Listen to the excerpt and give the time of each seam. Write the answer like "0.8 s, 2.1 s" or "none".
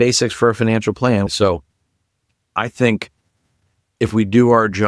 1.3 s